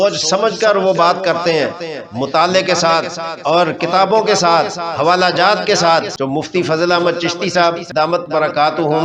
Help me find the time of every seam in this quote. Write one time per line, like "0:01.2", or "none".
0:06.1
0:07.8